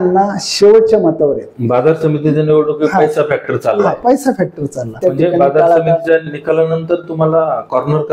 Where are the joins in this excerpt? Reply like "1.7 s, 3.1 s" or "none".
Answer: 1.5 s, 5.0 s